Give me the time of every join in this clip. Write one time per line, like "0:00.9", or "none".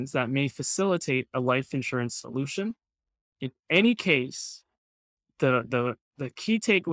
none